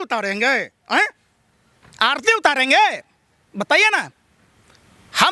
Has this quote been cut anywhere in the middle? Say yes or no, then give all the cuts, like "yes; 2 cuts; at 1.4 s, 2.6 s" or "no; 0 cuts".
no; 0 cuts